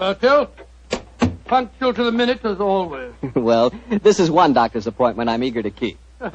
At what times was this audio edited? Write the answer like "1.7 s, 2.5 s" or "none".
1.8 s